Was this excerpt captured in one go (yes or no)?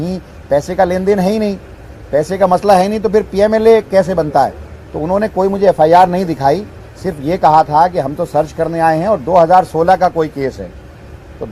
yes